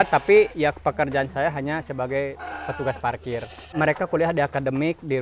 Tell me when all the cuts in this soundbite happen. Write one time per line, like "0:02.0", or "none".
0:03.6